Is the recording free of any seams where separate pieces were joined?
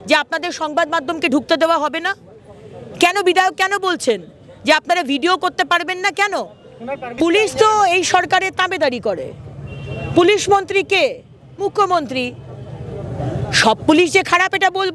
no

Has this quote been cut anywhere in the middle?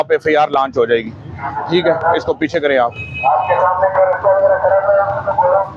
no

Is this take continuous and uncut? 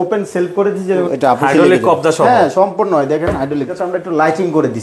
no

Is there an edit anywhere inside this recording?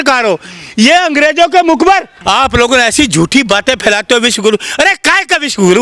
yes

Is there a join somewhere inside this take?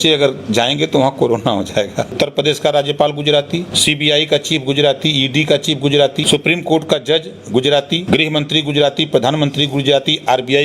yes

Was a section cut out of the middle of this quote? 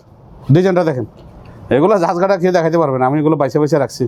no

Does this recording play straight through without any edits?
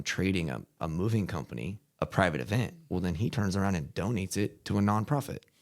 no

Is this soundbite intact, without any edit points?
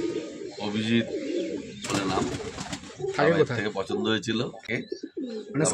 no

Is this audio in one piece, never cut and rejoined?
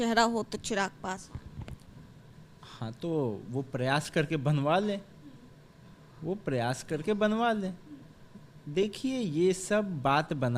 yes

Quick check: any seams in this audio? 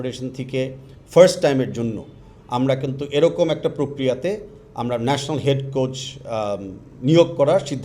no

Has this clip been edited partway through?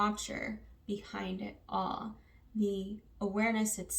no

